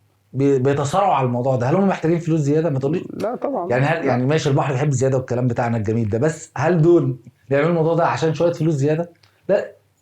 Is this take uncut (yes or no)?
yes